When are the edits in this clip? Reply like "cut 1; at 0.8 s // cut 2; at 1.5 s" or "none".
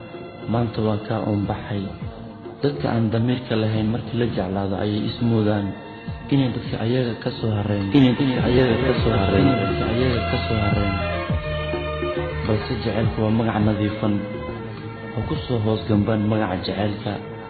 none